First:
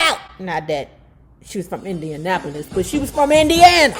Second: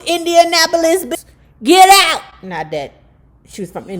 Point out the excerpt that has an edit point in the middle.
second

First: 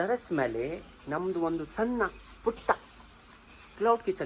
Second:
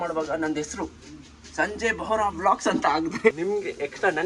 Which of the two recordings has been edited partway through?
second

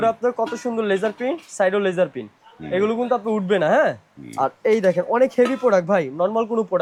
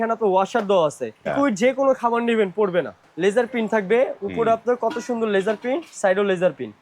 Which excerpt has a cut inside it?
second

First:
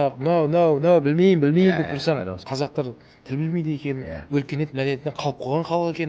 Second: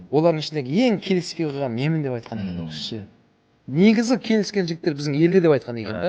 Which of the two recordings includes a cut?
first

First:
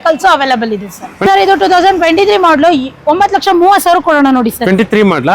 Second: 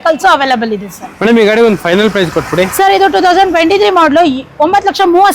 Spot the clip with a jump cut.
first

